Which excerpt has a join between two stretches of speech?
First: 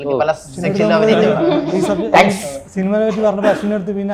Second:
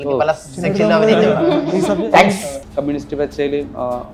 second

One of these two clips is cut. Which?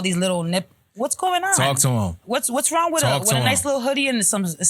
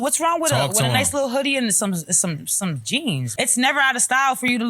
second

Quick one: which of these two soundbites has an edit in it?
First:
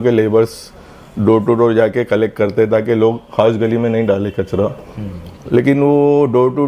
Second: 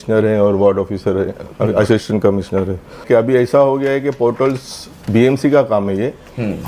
second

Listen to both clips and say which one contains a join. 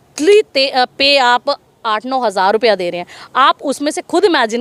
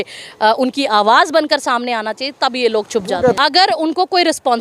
second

